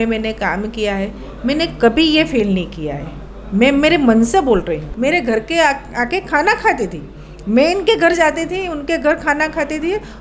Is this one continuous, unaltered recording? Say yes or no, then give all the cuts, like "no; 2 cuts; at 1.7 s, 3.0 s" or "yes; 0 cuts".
no; 1 cut; at 4.8 s